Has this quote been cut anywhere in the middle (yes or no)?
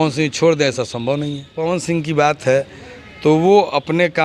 yes